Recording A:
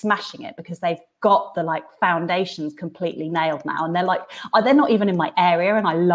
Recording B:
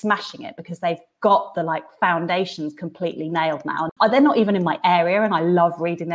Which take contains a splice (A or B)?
B